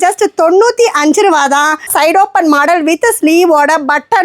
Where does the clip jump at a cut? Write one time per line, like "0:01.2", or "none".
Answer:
0:01.9